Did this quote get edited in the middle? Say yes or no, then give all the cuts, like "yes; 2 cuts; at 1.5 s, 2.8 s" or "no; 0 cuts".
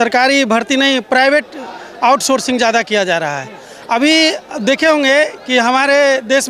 no; 0 cuts